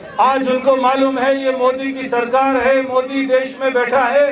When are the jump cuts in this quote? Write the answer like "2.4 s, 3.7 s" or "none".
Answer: none